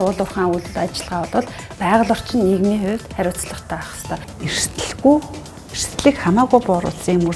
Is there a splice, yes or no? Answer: yes